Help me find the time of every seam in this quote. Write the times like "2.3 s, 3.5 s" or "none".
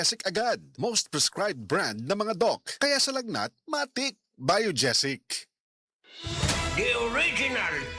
6.3 s

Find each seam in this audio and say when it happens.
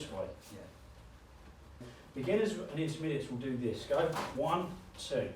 1.9 s

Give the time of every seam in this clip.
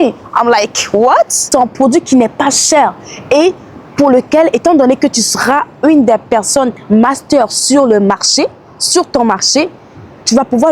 1.4 s

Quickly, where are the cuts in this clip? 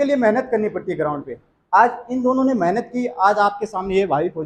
none

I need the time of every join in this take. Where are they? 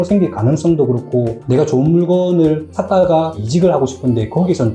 3.3 s

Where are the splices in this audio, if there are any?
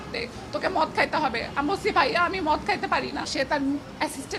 3.3 s

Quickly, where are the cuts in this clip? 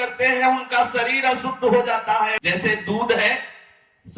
2.3 s

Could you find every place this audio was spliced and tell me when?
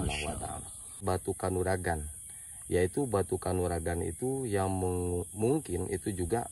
1.0 s

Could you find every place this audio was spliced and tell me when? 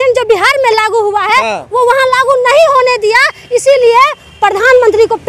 none

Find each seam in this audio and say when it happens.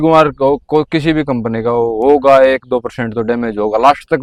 none

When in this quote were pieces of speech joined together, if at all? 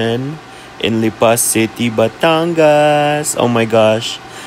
none

